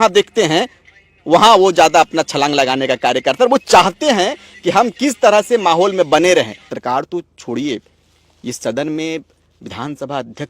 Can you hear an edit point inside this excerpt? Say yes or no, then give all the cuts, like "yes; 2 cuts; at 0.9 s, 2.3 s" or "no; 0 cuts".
yes; 1 cut; at 6.6 s